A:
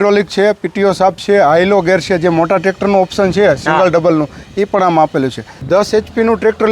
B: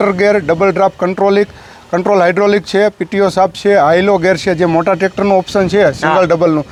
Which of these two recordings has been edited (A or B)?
A